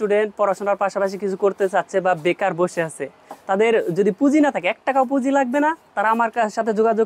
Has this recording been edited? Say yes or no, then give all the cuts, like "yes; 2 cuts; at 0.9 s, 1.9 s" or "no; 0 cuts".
no; 0 cuts